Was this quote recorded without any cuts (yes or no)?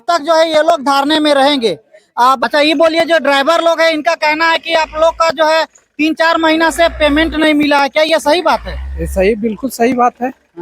no